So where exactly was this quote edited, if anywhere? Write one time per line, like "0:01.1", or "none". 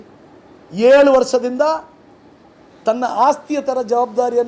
none